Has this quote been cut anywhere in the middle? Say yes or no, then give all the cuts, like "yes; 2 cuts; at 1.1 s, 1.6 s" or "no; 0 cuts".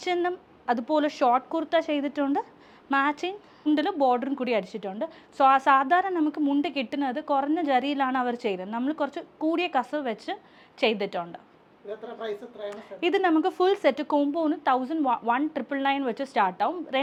no; 0 cuts